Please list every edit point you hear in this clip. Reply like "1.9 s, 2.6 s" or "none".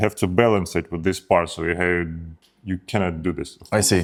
none